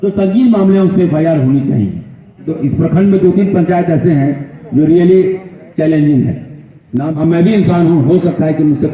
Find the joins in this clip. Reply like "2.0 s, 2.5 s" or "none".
2.5 s, 7.1 s